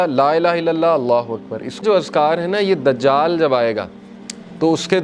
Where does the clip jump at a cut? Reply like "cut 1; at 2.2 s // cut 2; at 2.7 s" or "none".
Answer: cut 1; at 1.8 s